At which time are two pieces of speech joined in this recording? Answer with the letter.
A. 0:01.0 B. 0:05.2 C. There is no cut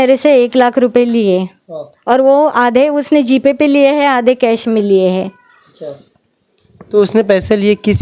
C